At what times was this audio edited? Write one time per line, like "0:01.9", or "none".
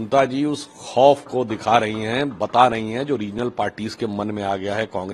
none